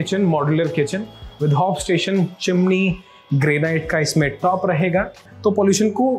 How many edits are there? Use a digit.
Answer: 1